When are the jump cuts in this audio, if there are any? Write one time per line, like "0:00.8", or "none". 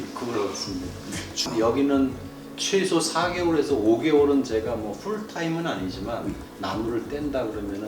0:01.3